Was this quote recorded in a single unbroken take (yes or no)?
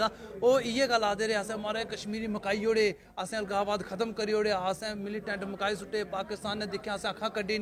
yes